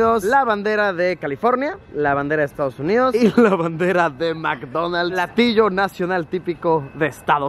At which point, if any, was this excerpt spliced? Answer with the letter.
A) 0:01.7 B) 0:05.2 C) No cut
B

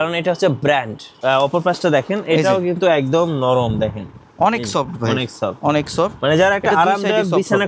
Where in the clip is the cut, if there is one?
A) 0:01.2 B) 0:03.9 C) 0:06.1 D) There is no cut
A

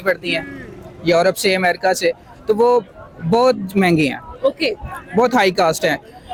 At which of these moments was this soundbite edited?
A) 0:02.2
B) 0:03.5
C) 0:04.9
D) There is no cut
D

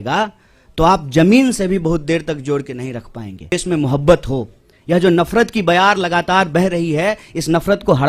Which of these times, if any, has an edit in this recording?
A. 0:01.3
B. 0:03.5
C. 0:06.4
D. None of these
B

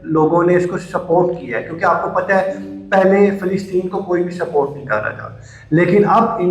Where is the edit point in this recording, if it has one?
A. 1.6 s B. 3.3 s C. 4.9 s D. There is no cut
D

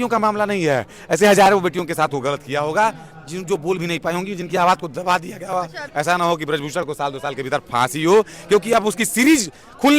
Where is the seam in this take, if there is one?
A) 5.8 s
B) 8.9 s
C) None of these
A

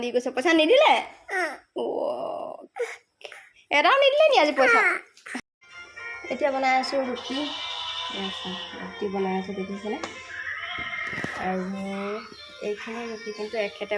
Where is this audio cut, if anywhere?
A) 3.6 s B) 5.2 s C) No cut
B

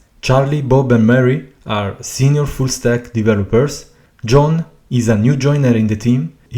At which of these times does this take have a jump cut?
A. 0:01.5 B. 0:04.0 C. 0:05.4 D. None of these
D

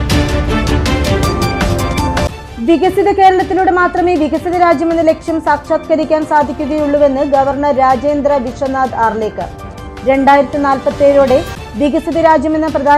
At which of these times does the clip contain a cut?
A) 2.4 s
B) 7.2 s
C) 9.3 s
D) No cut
A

